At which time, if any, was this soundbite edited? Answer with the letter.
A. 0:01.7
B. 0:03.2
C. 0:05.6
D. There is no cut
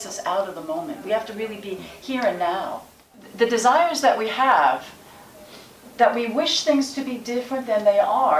B